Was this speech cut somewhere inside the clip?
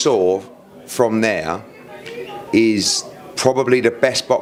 no; 0 cuts

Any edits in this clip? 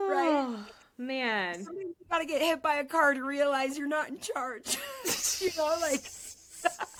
no; 0 cuts

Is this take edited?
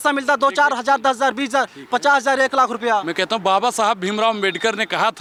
no; 0 cuts

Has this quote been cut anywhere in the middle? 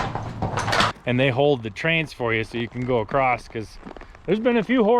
yes; 1 cut; at 1.0 s

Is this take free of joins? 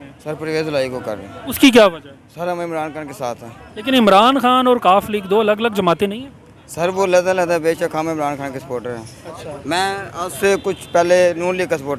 yes; 0 cuts

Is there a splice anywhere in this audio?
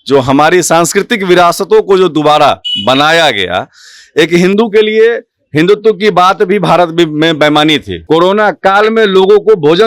yes; 1 cut; at 7.9 s

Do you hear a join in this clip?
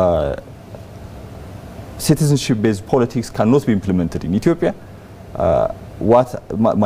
no; 0 cuts

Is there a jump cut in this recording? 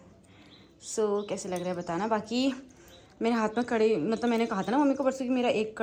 no; 0 cuts

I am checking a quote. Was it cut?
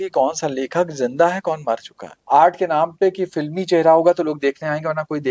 yes; 1 cut; at 2.1 s

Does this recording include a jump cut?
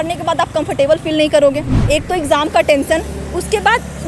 yes; 1 cut; at 1.7 s

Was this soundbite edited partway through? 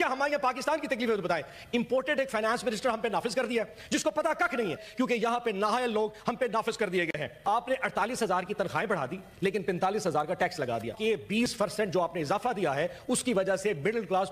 yes; 3 cuts; at 4.8 s, 7.4 s, 10.9 s

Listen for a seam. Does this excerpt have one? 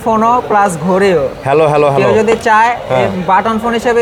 no; 0 cuts

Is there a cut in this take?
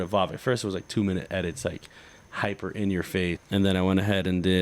yes; 1 cut; at 3.4 s

